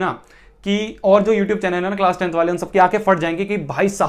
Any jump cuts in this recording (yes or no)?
no